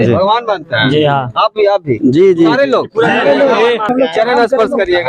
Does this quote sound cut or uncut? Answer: cut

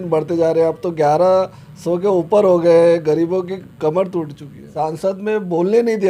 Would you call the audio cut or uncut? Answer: cut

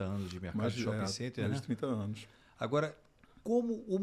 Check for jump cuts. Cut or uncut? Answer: uncut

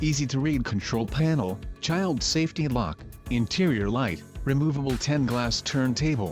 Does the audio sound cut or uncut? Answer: cut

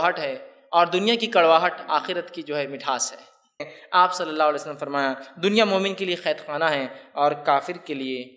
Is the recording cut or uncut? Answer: cut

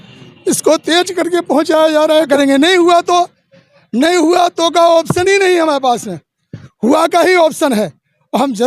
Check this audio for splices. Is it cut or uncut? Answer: cut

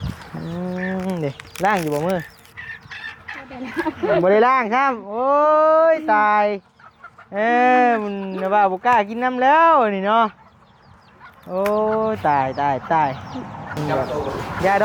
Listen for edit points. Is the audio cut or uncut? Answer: uncut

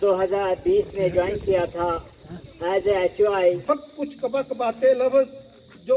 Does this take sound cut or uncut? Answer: cut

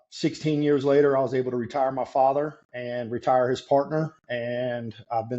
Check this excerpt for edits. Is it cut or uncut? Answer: uncut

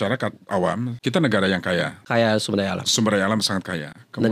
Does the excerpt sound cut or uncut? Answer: cut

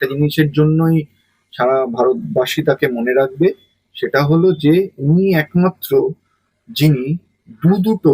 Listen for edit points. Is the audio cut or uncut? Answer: uncut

